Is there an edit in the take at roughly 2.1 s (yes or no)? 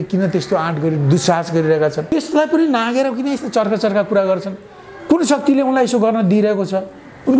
yes